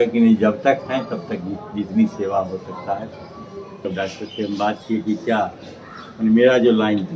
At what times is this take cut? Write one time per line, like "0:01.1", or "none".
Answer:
0:03.8